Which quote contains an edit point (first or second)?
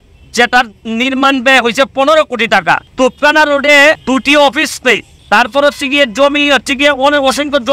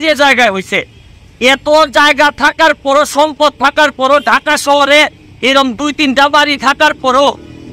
first